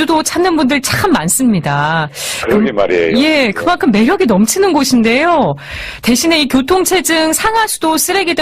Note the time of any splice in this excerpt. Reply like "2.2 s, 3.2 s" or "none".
5.2 s